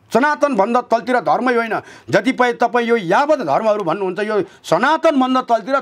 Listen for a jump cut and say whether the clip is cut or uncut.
uncut